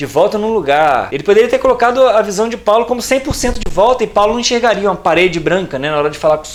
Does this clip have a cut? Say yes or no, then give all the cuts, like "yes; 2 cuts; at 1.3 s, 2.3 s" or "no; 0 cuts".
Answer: no; 0 cuts